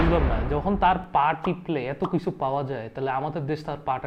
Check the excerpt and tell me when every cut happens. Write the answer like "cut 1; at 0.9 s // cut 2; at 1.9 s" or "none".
none